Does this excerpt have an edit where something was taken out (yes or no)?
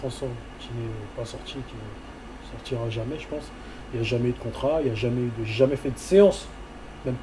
no